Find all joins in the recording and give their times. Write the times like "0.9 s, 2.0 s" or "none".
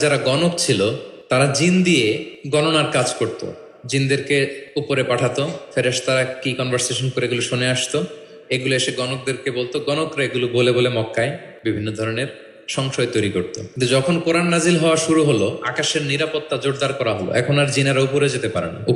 1.1 s, 2.3 s, 4.6 s, 11.5 s, 13.6 s